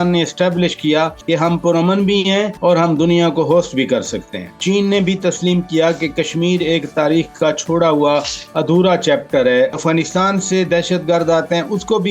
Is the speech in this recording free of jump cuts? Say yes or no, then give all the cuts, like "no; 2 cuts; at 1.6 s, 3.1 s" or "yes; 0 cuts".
no; 4 cuts; at 1.2 s, 2.5 s, 4.6 s, 9.8 s